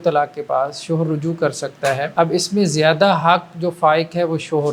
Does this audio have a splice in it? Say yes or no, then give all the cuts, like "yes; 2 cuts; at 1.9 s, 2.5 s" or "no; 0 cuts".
yes; 1 cut; at 2.1 s